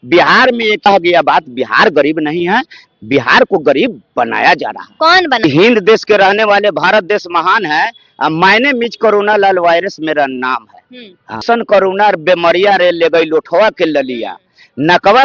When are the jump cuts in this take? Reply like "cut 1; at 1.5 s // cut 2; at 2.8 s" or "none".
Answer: cut 1; at 0.9 s // cut 2; at 5.4 s // cut 3; at 11.4 s

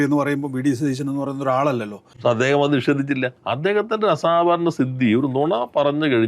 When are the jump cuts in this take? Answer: cut 1; at 2.0 s

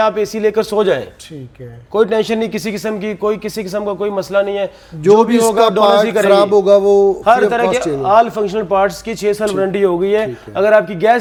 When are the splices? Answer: none

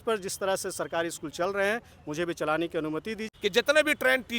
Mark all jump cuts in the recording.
cut 1; at 3.2 s

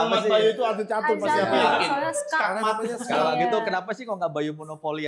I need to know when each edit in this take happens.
none

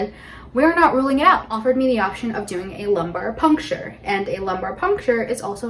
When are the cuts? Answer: cut 1; at 1.6 s

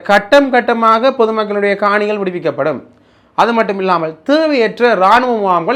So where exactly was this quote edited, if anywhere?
none

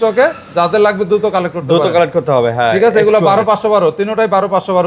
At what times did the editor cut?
none

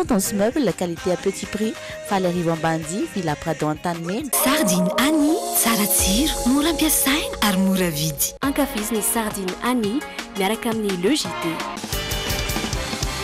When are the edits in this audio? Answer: cut 1; at 4.3 s

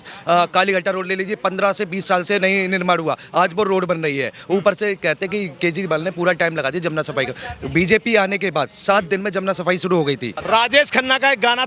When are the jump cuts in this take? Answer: cut 1; at 10.4 s

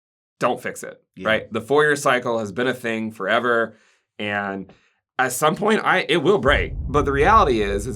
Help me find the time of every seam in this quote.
cut 1; at 6.7 s

